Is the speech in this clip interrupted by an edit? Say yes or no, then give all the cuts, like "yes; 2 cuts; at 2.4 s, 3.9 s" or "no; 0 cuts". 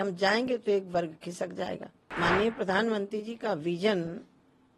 yes; 1 cut; at 2.1 s